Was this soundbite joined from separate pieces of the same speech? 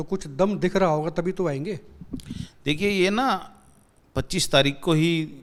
no; 0 cuts

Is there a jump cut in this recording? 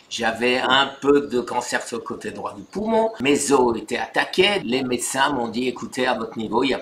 yes; 2 cuts; at 3.2 s, 4.6 s

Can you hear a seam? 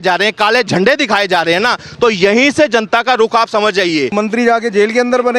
yes; 1 cut; at 4.1 s

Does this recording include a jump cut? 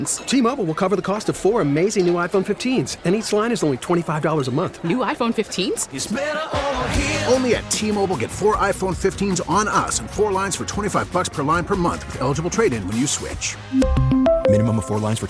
no; 0 cuts

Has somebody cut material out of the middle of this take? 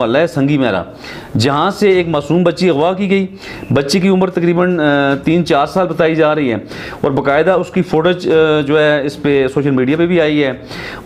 no; 0 cuts

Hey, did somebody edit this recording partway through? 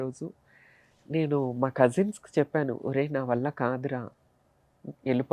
no; 0 cuts

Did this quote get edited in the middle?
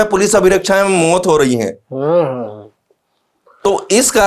no; 0 cuts

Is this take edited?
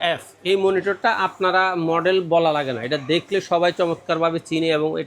no; 0 cuts

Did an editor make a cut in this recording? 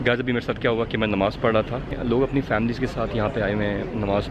yes; 1 cut; at 2.0 s

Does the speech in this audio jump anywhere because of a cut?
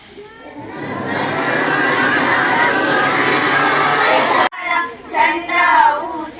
yes; 1 cut; at 4.5 s

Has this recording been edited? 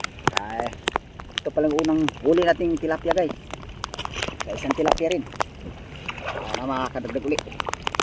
no; 0 cuts

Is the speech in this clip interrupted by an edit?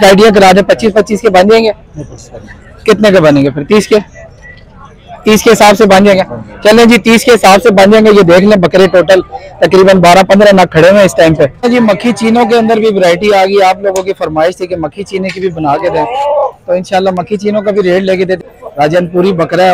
yes; 2 cuts; at 11.6 s, 18.4 s

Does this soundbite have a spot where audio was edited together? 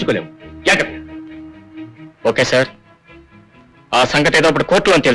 no; 0 cuts

